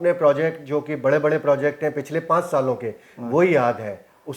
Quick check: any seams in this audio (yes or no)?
no